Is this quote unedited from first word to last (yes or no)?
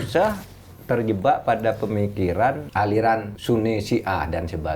no